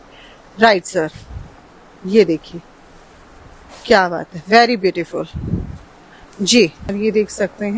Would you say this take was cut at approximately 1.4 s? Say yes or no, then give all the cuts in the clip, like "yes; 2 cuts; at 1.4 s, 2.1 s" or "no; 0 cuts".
no; 0 cuts